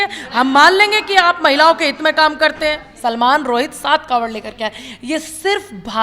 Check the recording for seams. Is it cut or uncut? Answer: cut